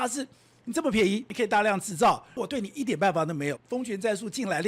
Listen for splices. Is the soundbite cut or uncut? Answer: cut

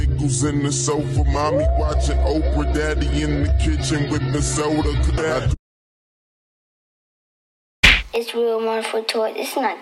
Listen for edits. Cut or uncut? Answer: cut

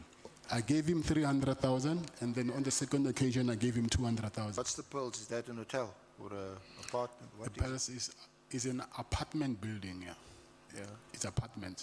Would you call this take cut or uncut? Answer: cut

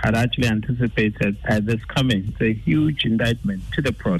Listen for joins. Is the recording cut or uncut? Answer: cut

